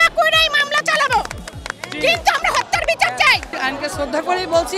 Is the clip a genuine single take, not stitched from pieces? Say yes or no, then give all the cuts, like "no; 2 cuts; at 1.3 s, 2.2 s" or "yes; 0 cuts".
no; 1 cut; at 3.5 s